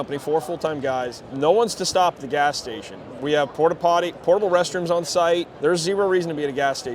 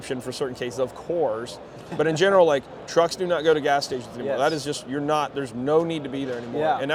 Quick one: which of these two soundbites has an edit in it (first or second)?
first